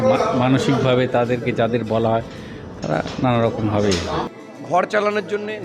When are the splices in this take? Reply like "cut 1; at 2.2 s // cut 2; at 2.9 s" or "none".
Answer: cut 1; at 4.3 s